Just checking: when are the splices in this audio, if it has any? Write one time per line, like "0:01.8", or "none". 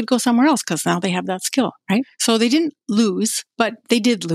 0:02.1
0:03.4

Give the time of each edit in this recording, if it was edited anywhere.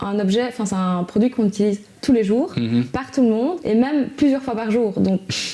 0:03.6

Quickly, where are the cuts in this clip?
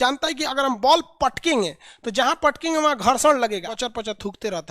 0:03.7

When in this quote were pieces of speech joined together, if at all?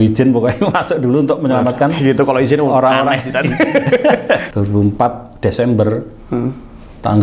0:04.5

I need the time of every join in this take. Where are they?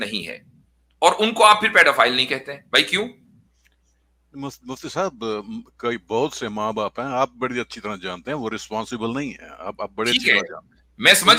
none

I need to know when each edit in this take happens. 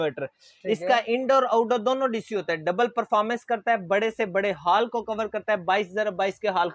none

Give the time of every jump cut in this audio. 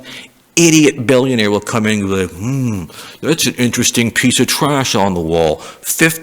none

